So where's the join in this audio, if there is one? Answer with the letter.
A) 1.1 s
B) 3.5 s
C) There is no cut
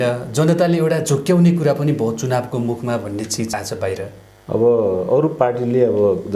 B